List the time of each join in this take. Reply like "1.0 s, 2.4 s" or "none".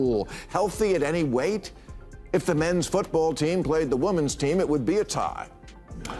none